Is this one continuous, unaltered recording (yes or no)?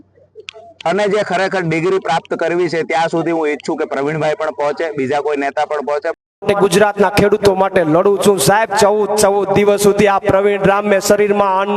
no